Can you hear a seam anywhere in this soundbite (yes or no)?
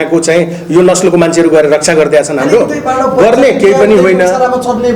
no